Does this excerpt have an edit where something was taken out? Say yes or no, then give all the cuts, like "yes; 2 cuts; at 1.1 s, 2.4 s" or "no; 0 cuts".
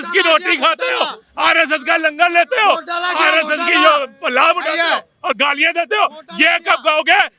no; 0 cuts